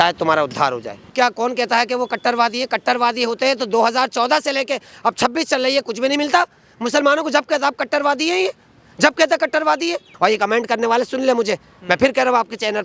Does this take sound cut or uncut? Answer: cut